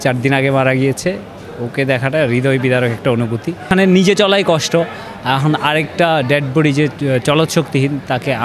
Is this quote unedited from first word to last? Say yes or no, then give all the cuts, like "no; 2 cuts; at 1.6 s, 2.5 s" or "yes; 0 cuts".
no; 1 cut; at 3.7 s